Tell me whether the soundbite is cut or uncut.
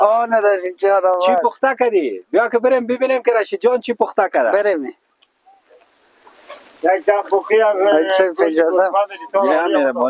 uncut